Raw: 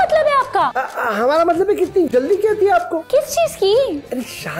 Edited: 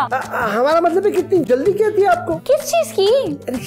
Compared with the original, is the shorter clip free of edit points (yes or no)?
yes